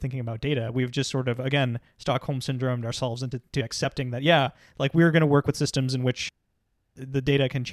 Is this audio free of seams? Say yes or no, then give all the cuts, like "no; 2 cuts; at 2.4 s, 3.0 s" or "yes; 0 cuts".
yes; 0 cuts